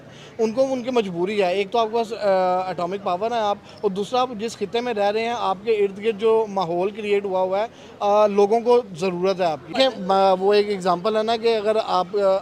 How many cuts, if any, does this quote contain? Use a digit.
1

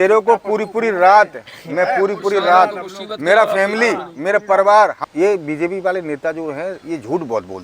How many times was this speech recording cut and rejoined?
1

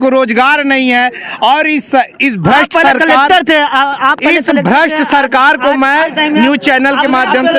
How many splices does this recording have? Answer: 0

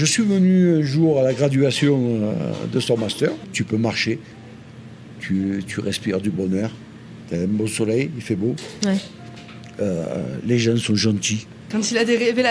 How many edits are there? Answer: 2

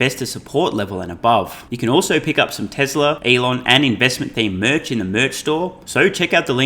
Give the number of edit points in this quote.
3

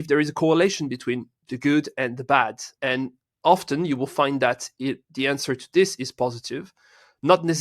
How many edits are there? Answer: 1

